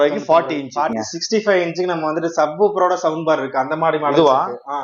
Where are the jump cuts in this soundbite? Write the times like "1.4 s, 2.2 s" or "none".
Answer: 0.9 s